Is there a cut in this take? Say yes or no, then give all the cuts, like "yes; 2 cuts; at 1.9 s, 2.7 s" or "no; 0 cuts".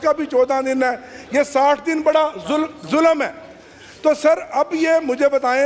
no; 0 cuts